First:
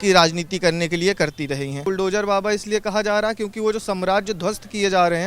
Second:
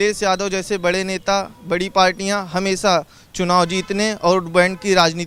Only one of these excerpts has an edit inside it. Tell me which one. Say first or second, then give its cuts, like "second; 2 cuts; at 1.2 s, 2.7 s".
first; 1 cut; at 1.8 s